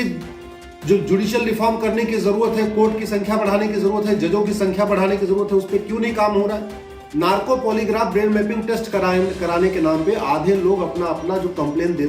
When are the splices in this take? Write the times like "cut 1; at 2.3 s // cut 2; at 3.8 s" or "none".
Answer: cut 1; at 7.0 s

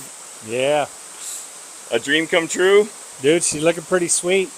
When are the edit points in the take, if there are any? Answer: none

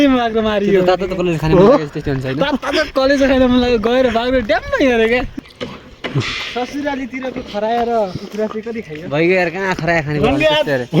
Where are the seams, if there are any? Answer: cut 1; at 5.3 s

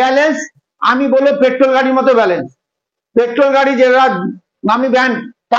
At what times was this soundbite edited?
none

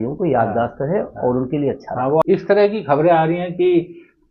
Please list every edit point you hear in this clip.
cut 1; at 2.2 s

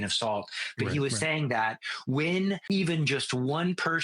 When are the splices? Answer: cut 1; at 2.6 s

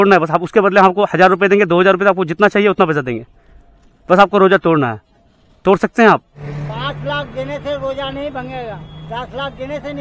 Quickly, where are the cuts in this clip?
cut 1; at 6.4 s // cut 2; at 9.1 s

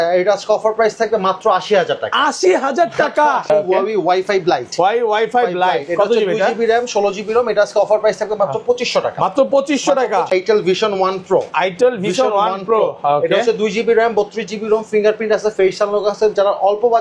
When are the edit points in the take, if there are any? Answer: cut 1; at 3.4 s // cut 2; at 10.3 s

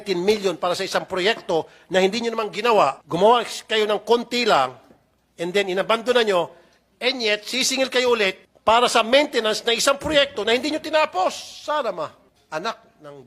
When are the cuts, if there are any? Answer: cut 1; at 3.0 s // cut 2; at 8.5 s // cut 3; at 12.3 s

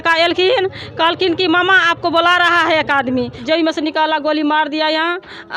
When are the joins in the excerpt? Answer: cut 1; at 3.4 s

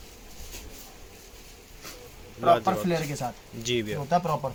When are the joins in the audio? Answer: none

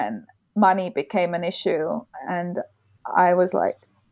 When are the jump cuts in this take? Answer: none

